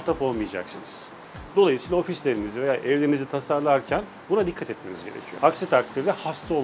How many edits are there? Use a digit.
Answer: 0